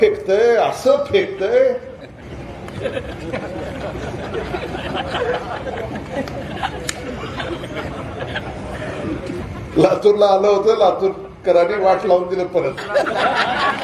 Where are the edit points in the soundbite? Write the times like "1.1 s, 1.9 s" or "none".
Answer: 2.2 s, 9.4 s